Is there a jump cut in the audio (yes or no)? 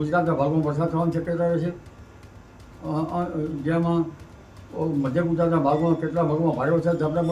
no